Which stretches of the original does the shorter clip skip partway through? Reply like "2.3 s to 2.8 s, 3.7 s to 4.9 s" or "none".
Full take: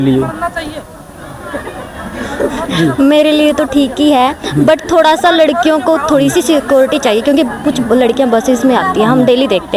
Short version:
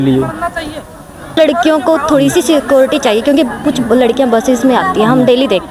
1.4 s to 5.4 s